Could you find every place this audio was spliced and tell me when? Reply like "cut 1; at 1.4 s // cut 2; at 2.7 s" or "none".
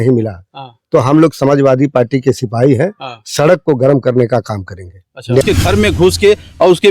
cut 1; at 5.4 s